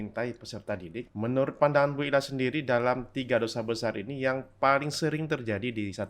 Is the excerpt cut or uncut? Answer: cut